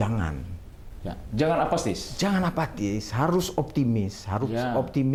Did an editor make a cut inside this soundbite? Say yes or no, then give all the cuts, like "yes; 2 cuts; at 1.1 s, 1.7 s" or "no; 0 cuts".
no; 0 cuts